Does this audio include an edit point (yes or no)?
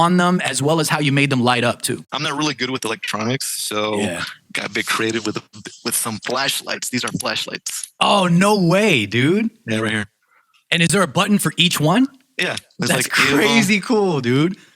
yes